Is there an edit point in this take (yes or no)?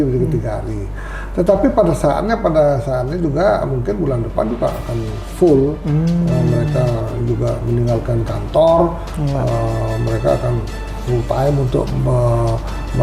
no